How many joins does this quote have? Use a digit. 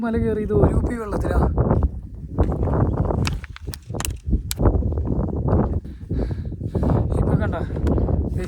0